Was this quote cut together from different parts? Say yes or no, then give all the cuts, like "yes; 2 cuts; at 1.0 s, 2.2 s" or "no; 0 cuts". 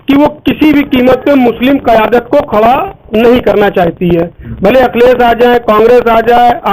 no; 0 cuts